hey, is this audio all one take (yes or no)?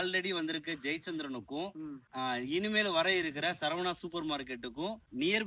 yes